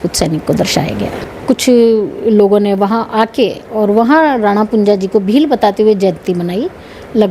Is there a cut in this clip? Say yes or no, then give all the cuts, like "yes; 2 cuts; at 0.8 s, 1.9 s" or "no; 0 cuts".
no; 0 cuts